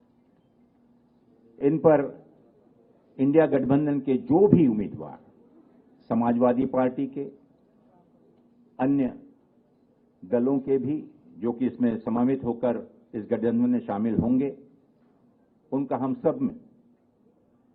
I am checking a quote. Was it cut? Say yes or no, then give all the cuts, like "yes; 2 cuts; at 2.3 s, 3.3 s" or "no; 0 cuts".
no; 0 cuts